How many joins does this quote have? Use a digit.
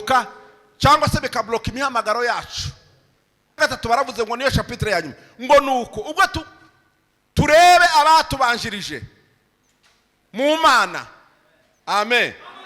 1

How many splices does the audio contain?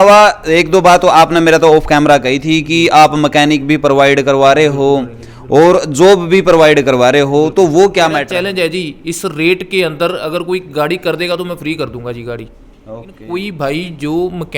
2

